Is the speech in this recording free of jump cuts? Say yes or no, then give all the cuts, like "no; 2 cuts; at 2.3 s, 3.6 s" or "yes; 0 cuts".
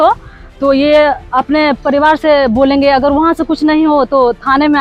yes; 0 cuts